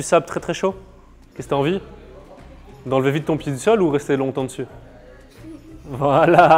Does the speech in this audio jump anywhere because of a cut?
no; 0 cuts

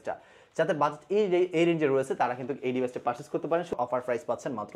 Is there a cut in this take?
yes; 1 cut; at 3.7 s

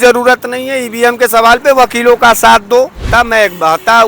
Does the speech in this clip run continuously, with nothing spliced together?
no; 1 cut; at 3.0 s

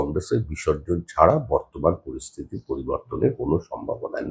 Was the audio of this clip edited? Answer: no; 0 cuts

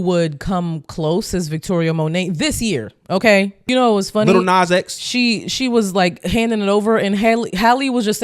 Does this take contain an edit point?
yes; 1 cut; at 3.6 s

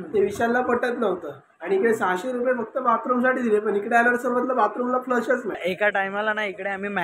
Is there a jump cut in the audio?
yes; 1 cut; at 5.6 s

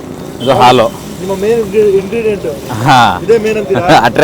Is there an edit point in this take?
no; 0 cuts

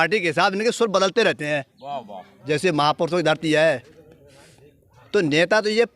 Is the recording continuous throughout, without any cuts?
no; 1 cut; at 2.4 s

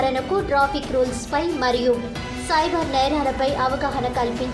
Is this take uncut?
yes; 0 cuts

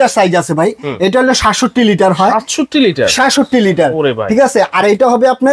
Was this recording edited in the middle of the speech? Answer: no; 0 cuts

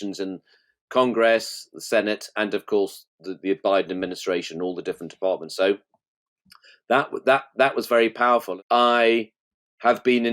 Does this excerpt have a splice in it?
yes; 1 cut; at 8.5 s

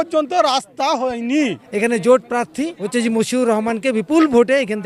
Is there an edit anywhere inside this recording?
yes; 2 cuts; at 1.6 s, 2.8 s

